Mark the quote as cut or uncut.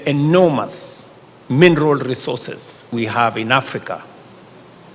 cut